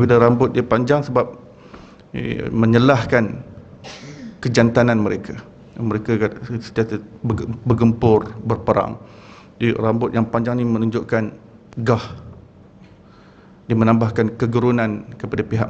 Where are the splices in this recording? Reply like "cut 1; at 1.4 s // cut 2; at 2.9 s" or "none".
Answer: none